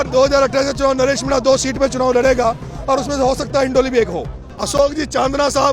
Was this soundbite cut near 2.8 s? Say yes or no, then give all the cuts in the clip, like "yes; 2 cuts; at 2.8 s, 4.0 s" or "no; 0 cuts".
no; 1 cut; at 4.8 s